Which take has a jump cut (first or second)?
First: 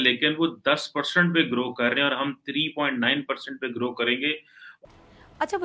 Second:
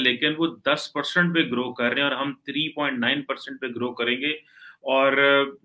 first